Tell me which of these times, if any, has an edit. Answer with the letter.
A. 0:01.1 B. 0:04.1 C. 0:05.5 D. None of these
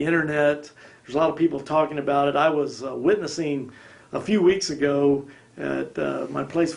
B